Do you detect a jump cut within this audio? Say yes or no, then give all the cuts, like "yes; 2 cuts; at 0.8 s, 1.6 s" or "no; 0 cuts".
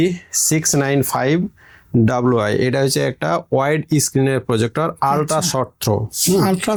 no; 0 cuts